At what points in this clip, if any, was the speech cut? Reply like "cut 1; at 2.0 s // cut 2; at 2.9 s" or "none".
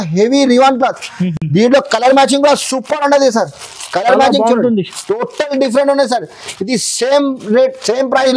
none